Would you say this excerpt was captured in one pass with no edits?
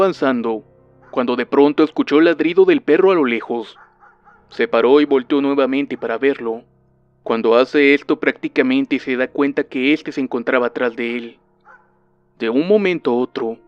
no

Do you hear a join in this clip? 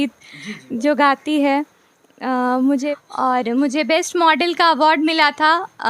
yes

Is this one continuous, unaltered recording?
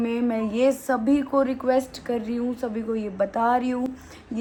yes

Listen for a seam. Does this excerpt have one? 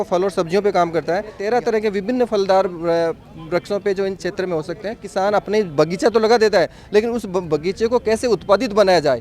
yes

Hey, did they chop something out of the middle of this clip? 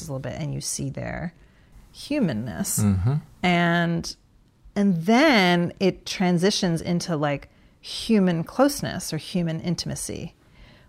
no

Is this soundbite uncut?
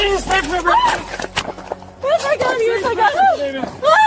no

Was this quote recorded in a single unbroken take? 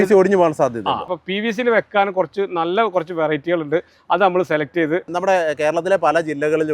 no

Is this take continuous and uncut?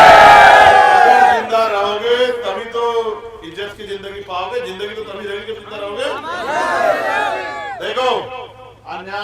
yes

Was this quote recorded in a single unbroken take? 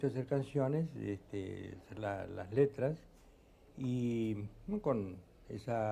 yes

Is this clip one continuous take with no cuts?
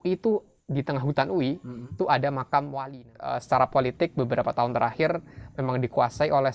no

